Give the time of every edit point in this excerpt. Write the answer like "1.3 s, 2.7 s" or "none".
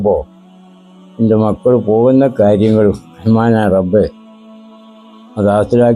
none